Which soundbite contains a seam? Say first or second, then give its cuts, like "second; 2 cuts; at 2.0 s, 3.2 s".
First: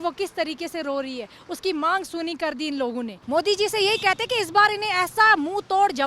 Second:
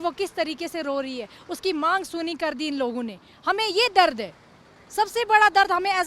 first; 1 cut; at 3.2 s